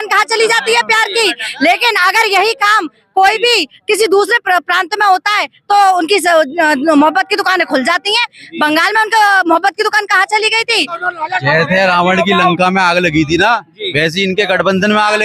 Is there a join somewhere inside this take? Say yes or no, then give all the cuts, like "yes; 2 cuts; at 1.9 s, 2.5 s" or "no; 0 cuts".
yes; 1 cut; at 11.0 s